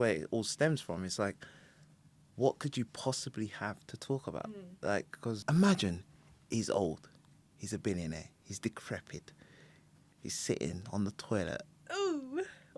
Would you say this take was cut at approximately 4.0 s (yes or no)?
no